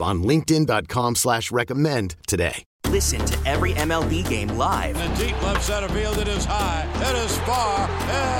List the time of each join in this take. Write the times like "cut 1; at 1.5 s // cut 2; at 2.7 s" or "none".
cut 1; at 2.7 s